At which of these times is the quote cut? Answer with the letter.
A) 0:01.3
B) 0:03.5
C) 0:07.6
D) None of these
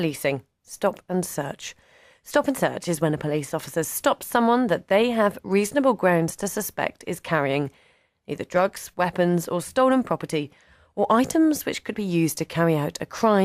D